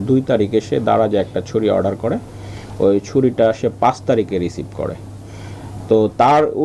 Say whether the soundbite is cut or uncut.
uncut